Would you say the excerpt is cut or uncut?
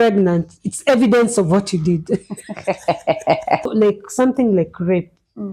cut